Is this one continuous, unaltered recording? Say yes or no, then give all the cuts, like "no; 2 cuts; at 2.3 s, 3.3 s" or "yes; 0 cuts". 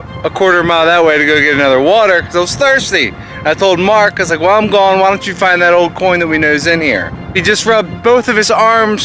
no; 1 cut; at 7.4 s